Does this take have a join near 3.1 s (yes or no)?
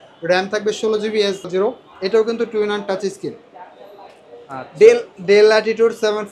no